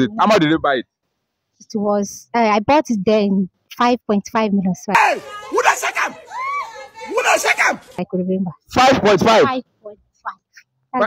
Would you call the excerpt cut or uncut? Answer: uncut